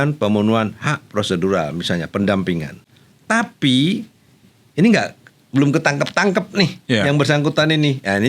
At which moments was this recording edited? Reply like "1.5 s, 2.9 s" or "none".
none